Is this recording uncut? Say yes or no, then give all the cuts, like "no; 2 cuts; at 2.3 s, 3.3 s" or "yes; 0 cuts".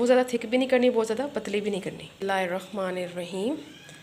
no; 1 cut; at 2.2 s